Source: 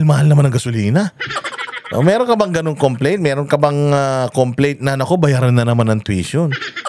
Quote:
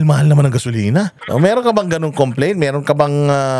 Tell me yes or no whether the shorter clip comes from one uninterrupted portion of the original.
no